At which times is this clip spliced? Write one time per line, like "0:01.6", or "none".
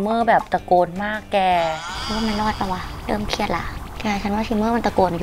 none